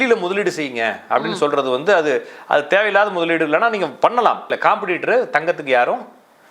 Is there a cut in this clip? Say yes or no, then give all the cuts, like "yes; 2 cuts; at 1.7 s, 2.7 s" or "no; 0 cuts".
yes; 1 cut; at 4.5 s